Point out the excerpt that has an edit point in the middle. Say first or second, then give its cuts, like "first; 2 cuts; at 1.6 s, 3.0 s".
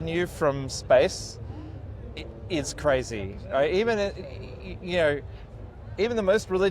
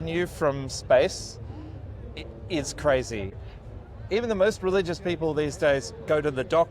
second; 1 cut; at 3.4 s